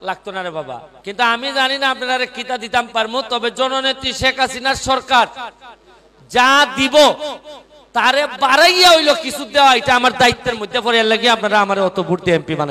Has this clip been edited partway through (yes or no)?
yes